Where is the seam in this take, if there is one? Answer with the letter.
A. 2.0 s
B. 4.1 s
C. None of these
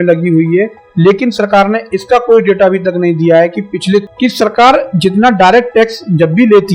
B